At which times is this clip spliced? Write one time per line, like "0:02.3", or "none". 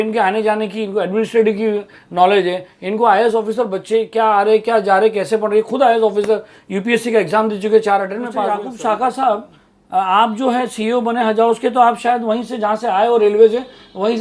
0:08.5